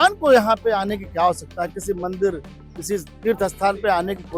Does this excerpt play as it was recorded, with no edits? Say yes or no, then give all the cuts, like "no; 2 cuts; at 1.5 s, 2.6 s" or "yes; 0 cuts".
yes; 0 cuts